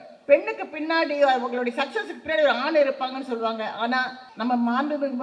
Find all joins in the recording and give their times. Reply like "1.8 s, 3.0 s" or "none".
4.2 s